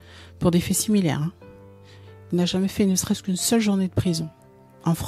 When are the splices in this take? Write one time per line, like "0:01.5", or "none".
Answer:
none